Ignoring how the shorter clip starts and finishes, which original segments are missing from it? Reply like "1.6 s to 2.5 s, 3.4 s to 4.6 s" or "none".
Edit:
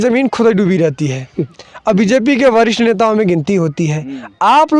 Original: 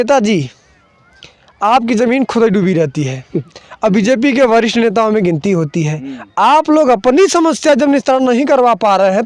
none